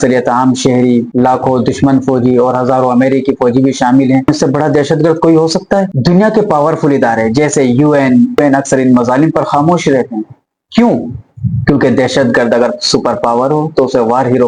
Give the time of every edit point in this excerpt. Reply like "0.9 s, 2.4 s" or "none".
none

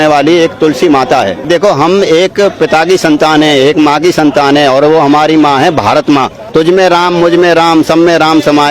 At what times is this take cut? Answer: 1.4 s, 6.4 s

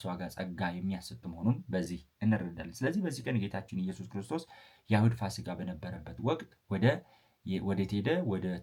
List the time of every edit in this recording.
none

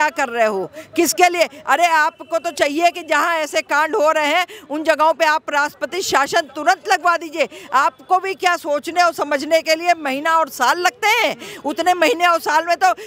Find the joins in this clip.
none

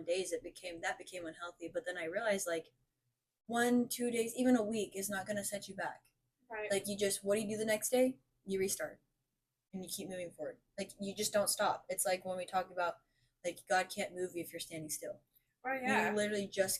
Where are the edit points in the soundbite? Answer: none

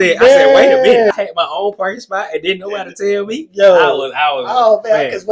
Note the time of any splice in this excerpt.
1.1 s

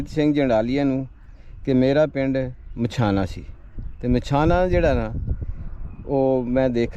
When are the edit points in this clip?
none

